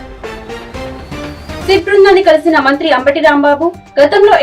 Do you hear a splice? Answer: yes; 1 cut; at 1.6 s

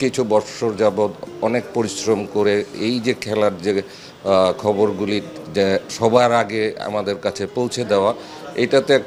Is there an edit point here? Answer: no; 0 cuts

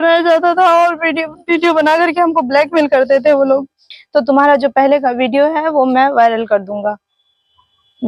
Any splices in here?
yes; 1 cut; at 4.0 s

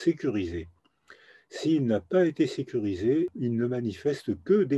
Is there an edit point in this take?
yes; 1 cut; at 3.4 s

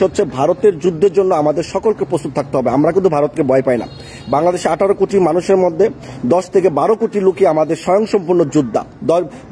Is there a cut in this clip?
no; 0 cuts

